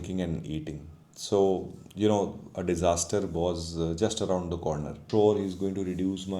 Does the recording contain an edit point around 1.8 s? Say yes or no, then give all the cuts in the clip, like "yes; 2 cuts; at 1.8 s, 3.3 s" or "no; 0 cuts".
no; 1 cut; at 5.0 s